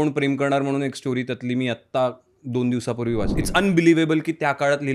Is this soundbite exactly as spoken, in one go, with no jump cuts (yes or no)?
no